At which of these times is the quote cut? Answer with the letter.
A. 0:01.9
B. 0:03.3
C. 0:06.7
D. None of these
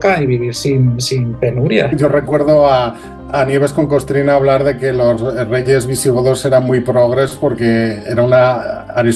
A